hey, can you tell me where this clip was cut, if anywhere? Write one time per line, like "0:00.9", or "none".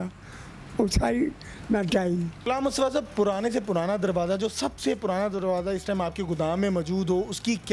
0:02.4